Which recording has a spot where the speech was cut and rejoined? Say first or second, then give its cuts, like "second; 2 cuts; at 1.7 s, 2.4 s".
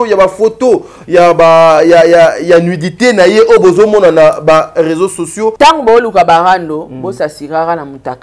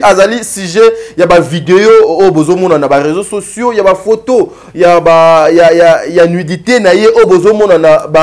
first; 1 cut; at 5.5 s